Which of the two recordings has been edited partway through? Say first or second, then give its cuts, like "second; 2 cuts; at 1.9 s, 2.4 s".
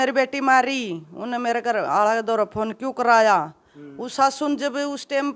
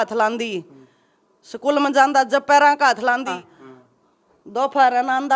second; 1 cut; at 3.4 s